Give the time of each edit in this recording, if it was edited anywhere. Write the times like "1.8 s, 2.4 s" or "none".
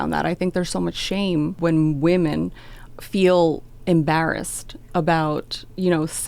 1.5 s